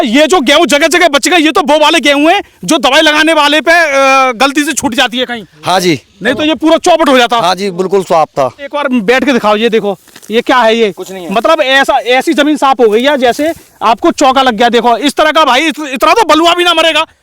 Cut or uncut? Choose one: cut